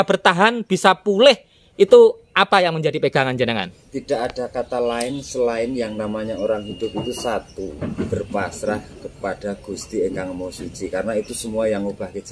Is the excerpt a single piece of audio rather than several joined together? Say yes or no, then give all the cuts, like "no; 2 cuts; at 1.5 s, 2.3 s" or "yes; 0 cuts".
yes; 0 cuts